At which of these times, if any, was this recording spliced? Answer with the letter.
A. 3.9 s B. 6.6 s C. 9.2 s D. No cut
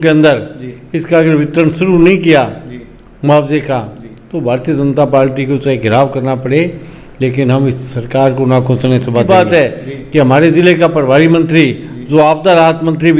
C